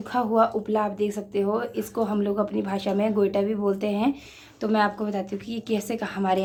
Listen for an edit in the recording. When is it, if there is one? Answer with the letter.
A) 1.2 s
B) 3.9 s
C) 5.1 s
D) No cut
D